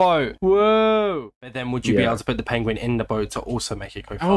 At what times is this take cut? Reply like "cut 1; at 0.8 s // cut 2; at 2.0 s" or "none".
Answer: cut 1; at 1.6 s